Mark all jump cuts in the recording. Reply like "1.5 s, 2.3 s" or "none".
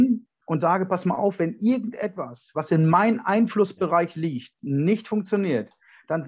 none